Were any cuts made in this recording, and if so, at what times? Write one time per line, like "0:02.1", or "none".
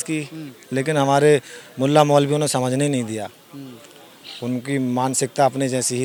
none